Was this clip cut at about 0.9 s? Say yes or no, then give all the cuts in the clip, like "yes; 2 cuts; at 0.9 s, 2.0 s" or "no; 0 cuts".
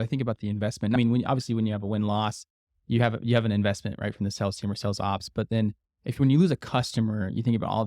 yes; 1 cut; at 0.9 s